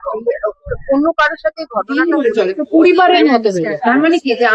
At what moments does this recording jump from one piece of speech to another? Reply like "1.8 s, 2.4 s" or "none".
1.9 s